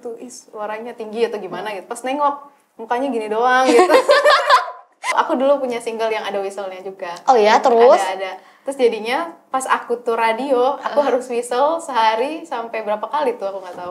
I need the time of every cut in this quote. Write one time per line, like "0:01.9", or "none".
0:05.1